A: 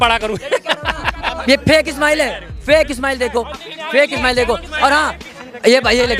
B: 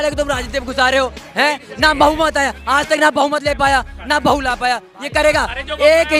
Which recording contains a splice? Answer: A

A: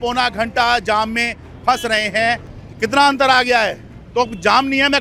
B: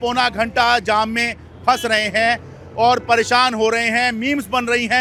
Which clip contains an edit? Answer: A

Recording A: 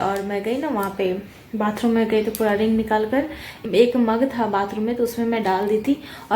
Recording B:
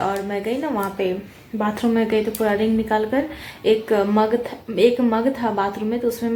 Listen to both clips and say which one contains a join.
A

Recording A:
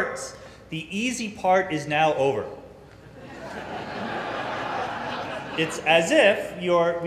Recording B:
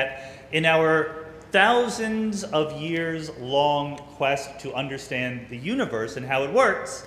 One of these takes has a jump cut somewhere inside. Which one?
B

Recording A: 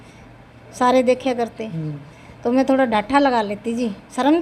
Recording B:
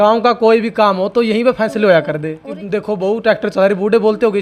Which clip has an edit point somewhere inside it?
B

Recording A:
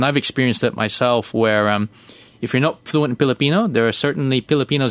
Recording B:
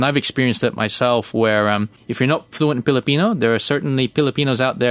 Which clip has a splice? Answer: B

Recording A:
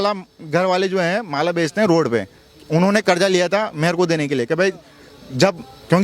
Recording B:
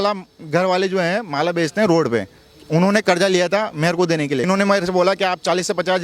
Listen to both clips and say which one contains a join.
B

